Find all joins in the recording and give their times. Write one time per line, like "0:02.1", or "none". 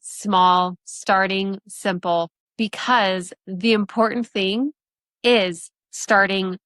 0:02.4